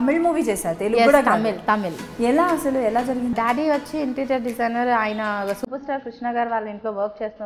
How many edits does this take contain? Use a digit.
1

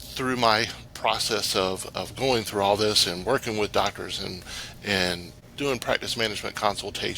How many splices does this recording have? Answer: 1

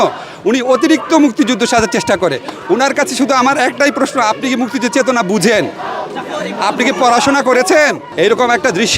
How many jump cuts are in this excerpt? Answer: 1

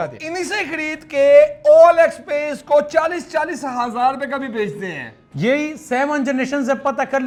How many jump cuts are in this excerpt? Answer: 0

